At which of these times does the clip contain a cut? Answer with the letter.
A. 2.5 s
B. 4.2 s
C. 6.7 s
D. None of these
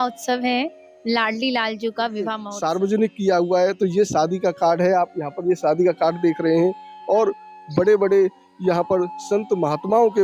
A